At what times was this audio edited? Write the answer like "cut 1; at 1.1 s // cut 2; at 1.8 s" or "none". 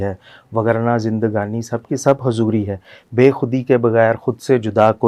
none